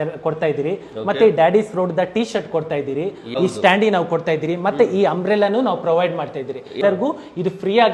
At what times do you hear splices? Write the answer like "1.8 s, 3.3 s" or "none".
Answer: 3.2 s, 6.8 s